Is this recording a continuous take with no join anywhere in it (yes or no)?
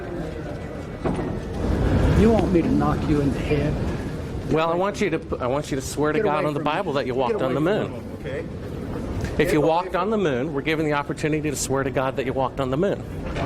no